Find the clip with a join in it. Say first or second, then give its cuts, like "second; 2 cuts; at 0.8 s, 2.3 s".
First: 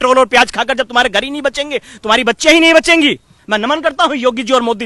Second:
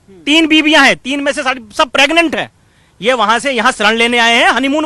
first; 1 cut; at 3.3 s